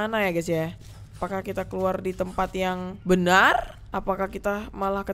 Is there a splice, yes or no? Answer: yes